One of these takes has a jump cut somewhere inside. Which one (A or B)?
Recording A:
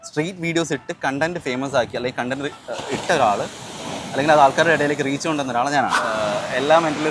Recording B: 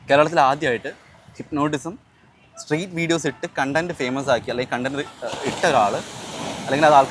A